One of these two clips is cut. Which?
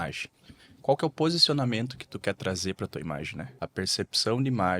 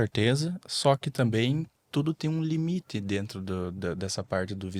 first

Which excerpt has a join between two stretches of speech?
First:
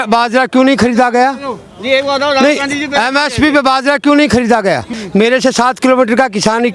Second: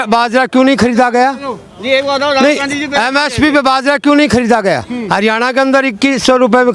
first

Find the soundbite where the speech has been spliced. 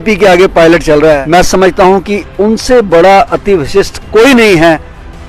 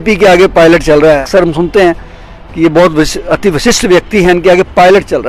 first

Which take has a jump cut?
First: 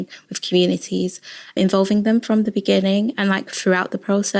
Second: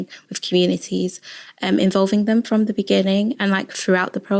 first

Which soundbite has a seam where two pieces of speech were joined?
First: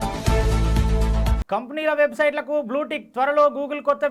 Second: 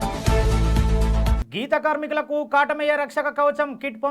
second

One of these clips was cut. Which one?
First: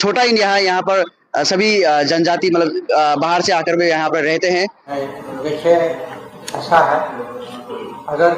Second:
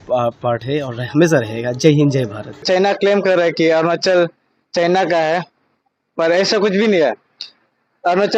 first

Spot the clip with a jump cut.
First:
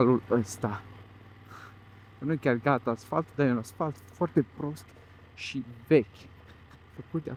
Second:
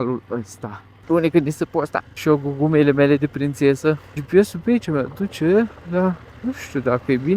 second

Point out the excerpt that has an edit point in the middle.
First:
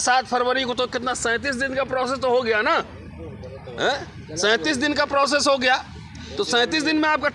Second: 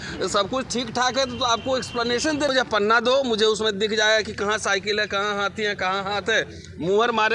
second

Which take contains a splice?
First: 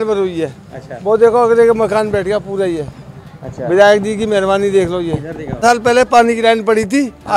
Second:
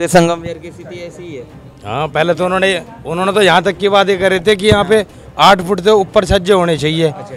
first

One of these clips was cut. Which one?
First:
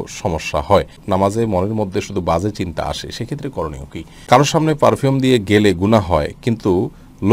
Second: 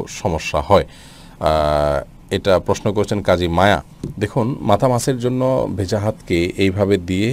first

